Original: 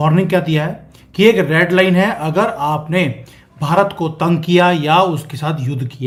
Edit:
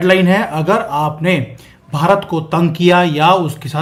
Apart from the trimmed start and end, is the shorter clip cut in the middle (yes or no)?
no